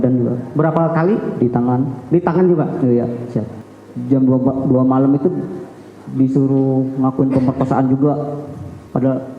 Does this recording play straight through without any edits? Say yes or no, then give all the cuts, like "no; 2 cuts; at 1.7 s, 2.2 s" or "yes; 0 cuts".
no; 1 cut; at 3.6 s